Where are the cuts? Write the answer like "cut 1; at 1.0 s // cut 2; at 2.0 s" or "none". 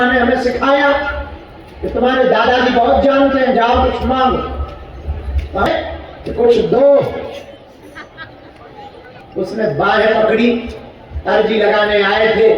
cut 1; at 5.7 s // cut 2; at 9.2 s